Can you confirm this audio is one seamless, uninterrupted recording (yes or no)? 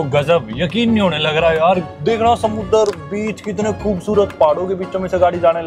no